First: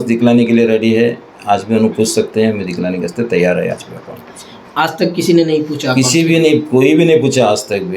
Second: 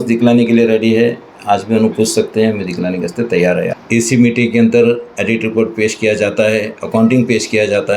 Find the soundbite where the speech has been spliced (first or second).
second